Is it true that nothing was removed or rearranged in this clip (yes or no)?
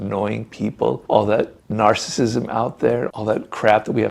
no